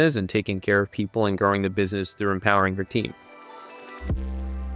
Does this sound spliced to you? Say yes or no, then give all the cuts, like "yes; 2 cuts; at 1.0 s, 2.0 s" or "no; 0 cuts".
yes; 1 cut; at 3.2 s